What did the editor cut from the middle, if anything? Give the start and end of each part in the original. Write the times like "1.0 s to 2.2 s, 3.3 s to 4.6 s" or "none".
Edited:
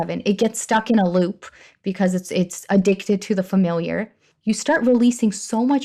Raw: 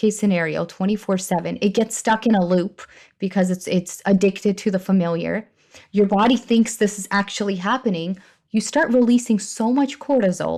5.6 s to 8.3 s